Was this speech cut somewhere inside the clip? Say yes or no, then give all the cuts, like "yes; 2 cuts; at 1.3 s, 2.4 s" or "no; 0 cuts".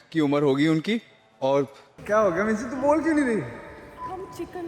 yes; 1 cut; at 1.9 s